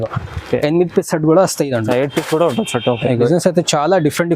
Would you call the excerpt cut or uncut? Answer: cut